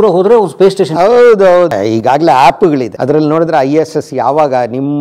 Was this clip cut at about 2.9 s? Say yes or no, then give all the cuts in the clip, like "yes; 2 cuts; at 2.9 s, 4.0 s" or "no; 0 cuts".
yes; 2 cuts; at 1.7 s, 2.9 s